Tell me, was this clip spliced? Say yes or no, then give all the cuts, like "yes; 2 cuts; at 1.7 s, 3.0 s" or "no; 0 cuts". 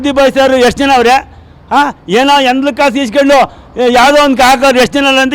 no; 0 cuts